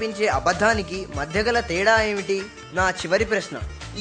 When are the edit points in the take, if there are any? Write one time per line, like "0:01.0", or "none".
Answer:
0:02.6